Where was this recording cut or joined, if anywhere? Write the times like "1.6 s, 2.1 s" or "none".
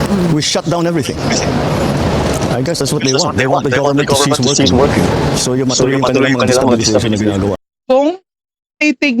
7.6 s